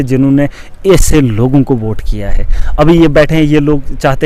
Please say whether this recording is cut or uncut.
uncut